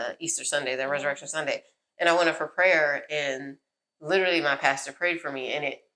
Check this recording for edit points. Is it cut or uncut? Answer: uncut